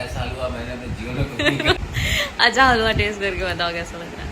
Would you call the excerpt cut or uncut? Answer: cut